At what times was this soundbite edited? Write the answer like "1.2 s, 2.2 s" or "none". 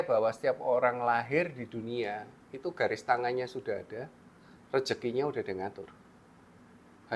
none